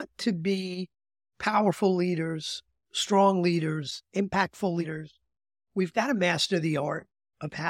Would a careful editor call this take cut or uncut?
uncut